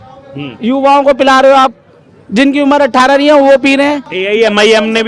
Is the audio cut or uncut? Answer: cut